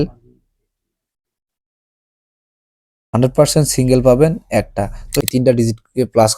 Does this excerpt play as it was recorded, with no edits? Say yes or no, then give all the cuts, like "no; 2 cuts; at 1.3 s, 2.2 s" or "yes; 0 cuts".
no; 1 cut; at 5.1 s